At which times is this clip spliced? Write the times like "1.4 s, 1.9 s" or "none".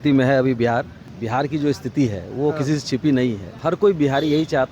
1.0 s, 3.5 s